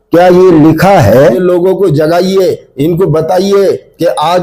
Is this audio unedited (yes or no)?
no